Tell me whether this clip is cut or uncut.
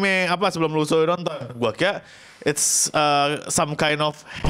uncut